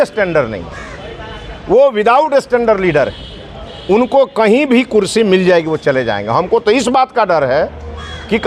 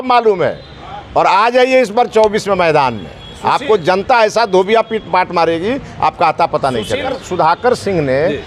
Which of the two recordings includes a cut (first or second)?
second